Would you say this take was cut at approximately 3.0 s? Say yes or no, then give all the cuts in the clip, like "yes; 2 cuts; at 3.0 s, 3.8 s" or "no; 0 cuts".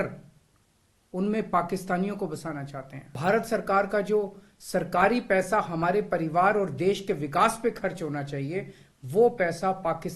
yes; 1 cut; at 3.0 s